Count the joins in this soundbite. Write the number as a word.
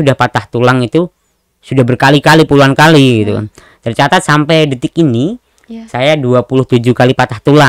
zero